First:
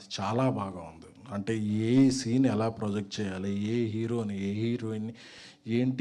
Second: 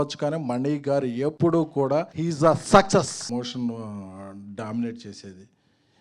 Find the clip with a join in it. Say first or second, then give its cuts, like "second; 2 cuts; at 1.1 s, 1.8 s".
second; 3 cuts; at 1.3 s, 2.1 s, 3.3 s